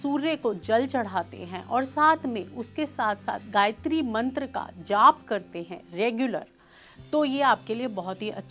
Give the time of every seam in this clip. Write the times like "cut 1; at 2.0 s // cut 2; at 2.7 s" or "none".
none